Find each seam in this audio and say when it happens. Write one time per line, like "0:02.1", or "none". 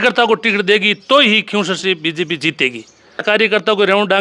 0:03.2